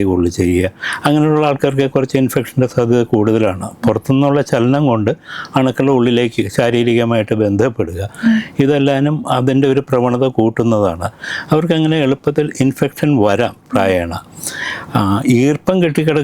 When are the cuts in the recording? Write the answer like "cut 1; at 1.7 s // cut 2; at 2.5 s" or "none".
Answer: none